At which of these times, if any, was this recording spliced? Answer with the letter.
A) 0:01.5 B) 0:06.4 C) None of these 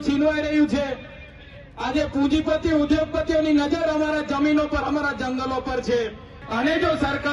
B